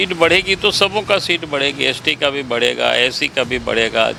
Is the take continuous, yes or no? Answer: yes